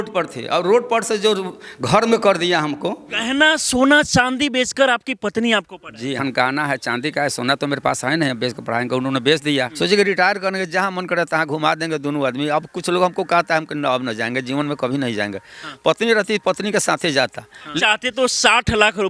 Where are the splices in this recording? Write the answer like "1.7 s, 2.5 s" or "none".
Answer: 3.1 s, 6.2 s, 9.7 s, 17.7 s